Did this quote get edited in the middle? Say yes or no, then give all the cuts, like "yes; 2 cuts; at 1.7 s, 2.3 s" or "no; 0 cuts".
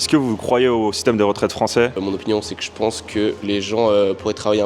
yes; 2 cuts; at 2.0 s, 3.4 s